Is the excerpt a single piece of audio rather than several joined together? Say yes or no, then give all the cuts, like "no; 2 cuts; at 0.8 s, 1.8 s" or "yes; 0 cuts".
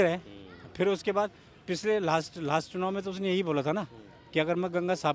yes; 0 cuts